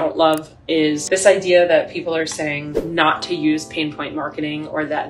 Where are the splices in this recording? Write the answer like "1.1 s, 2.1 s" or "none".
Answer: 1.0 s